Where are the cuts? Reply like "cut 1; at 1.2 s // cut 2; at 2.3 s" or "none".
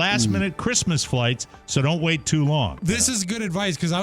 cut 1; at 2.7 s